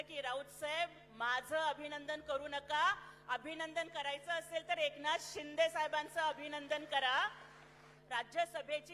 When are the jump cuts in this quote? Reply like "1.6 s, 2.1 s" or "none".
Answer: 7.9 s

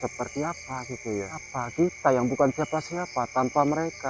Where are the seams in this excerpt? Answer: 1.4 s

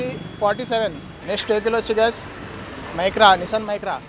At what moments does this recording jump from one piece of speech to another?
1.1 s

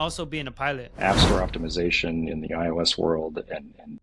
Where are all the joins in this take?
0.9 s

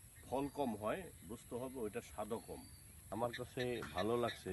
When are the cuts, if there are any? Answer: 3.0 s

